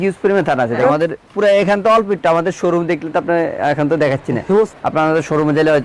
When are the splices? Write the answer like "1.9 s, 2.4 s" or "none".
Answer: 0.8 s, 4.7 s